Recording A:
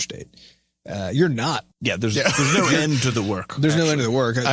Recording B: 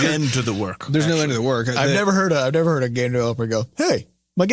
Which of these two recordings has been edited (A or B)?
A